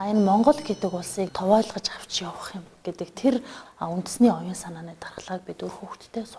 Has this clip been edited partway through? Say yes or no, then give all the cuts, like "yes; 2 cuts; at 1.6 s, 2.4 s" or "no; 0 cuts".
yes; 1 cut; at 3.6 s